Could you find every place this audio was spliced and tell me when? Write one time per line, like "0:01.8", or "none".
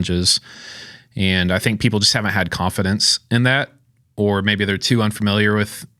none